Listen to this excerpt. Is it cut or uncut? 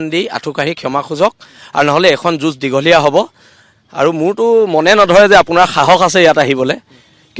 uncut